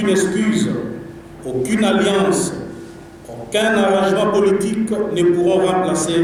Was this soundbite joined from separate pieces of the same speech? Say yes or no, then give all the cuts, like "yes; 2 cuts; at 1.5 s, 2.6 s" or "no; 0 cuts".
no; 0 cuts